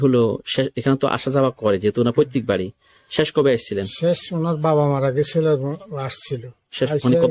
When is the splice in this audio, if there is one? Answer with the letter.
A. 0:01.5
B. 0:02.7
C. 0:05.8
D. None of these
D